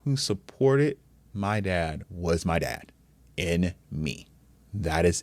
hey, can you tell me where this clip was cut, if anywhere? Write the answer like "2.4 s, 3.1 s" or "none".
2.0 s